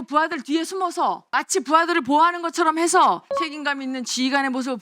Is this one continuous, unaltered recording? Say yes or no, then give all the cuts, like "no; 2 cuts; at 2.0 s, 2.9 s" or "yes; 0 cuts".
no; 2 cuts; at 1.2 s, 3.3 s